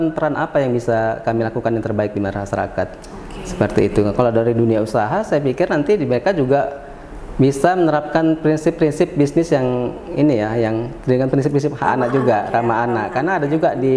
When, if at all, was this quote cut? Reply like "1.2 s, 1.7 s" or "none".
none